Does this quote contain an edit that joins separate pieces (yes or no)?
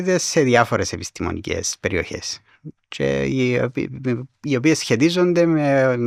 no